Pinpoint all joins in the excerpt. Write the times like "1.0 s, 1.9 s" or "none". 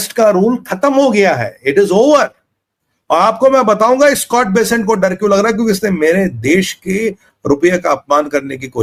none